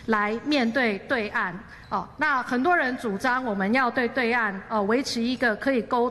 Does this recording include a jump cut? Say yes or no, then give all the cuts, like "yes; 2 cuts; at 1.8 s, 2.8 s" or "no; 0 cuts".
no; 0 cuts